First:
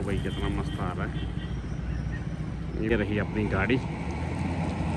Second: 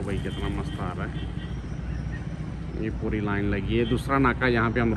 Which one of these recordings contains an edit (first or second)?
first